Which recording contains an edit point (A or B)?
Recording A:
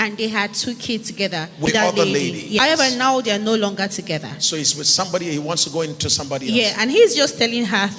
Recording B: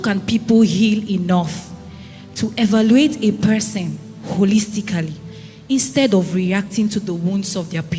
A